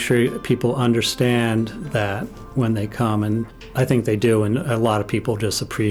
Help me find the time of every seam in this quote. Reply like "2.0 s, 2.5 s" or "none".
1.8 s, 3.6 s